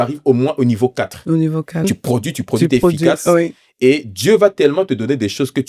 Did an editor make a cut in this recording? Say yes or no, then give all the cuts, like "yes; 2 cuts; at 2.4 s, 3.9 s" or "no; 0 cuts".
yes; 1 cut; at 1.8 s